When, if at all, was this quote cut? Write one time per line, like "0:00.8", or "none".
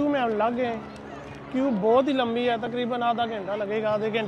none